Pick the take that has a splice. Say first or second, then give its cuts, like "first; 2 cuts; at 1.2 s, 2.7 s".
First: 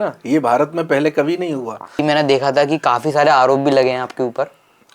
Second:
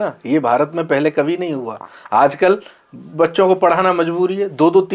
first; 1 cut; at 2.0 s